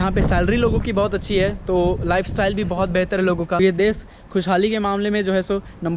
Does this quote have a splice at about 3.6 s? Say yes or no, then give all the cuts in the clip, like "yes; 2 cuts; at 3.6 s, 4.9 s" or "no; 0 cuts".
yes; 1 cut; at 3.6 s